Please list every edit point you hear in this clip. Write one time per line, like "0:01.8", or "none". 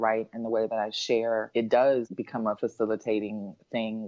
0:01.5
0:02.4